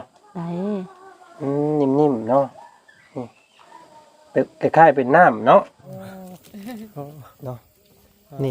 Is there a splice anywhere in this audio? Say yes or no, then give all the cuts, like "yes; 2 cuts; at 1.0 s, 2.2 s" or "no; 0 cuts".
yes; 1 cut; at 5.9 s